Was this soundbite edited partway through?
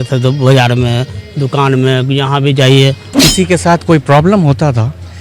yes; 1 cut; at 3.1 s

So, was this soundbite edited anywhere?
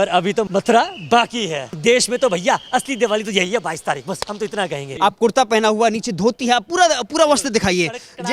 yes; 2 cuts; at 1.8 s, 4.9 s

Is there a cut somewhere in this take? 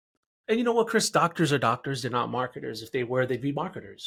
no; 0 cuts

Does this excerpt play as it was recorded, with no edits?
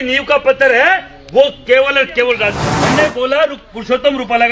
no; 1 cut; at 2.7 s

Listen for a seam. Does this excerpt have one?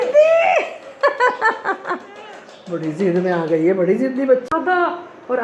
yes; 1 cut; at 4.5 s

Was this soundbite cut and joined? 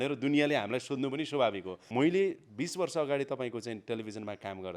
yes; 1 cut; at 1.7 s

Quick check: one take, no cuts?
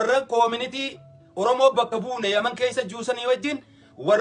yes; 0 cuts

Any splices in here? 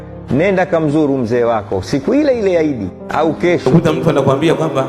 yes; 1 cut; at 3.7 s

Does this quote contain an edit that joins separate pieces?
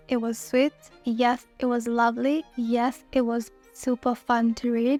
no; 0 cuts

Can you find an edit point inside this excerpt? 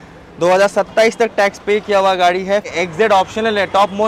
yes; 1 cut; at 2.7 s

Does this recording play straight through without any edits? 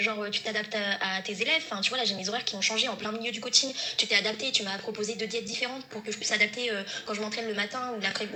yes; 0 cuts

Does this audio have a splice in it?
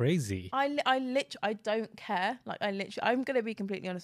no; 0 cuts

